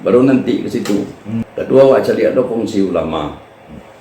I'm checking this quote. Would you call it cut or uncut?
cut